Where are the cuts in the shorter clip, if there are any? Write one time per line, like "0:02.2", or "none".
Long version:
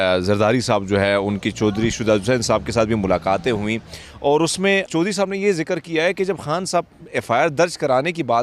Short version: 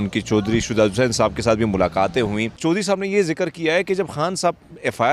0:02.6